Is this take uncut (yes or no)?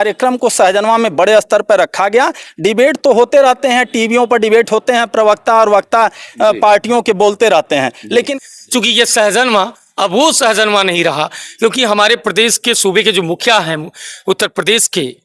no